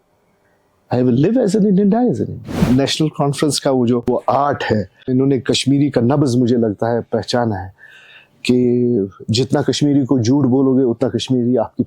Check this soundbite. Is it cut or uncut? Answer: cut